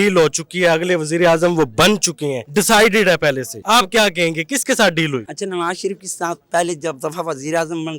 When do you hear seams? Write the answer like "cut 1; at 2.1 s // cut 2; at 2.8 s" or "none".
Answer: cut 1; at 2.4 s // cut 2; at 3.5 s // cut 3; at 5.3 s